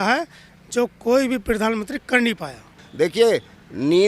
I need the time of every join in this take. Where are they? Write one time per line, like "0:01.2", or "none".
0:02.8